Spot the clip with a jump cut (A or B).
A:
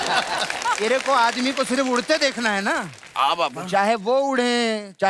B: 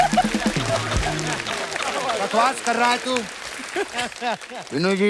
B